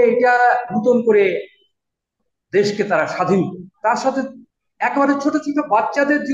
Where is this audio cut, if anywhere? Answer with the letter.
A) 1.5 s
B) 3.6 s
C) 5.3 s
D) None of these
B